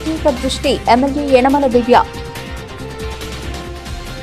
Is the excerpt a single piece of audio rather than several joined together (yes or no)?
no